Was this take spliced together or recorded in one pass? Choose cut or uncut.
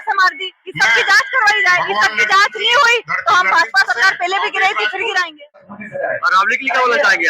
cut